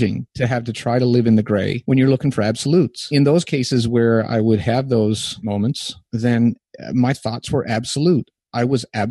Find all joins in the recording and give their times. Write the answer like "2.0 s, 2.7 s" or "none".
1.8 s, 3.1 s, 5.6 s